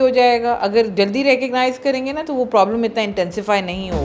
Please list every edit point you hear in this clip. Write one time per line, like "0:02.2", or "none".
none